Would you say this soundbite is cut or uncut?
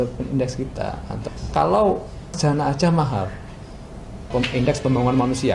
cut